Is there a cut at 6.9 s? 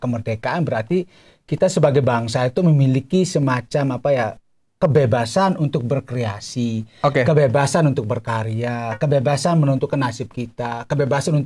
no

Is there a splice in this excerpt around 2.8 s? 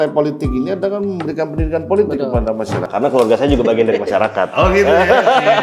yes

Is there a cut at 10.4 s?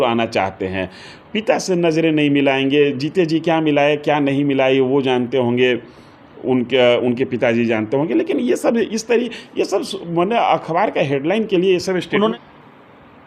no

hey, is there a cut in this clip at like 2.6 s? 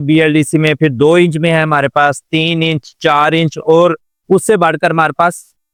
no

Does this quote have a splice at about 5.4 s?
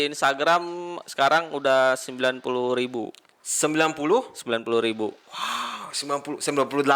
no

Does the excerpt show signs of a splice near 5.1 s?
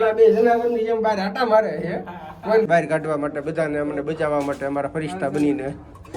no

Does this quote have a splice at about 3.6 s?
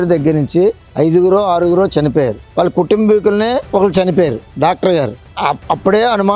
yes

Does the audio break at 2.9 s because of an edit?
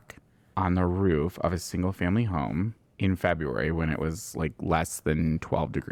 no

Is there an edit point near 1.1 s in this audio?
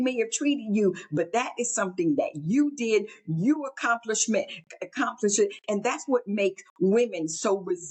no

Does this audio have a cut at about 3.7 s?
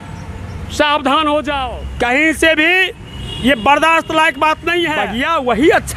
no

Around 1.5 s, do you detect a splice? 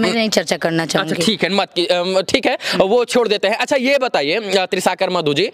no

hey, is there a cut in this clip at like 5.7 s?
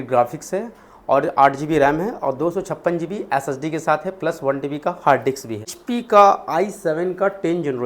yes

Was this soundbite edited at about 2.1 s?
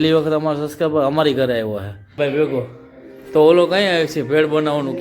yes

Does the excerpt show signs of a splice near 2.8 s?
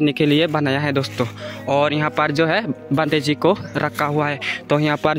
no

